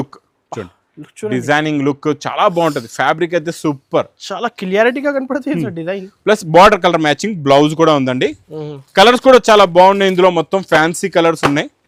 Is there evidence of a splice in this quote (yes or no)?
no